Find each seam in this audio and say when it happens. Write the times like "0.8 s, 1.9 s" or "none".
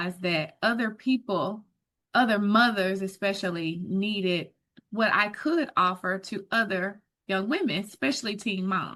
none